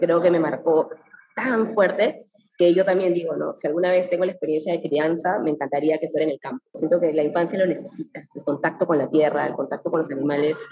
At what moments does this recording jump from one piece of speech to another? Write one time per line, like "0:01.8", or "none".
none